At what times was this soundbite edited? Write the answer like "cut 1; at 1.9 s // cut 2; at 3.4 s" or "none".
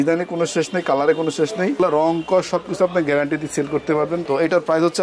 cut 1; at 1.8 s // cut 2; at 4.2 s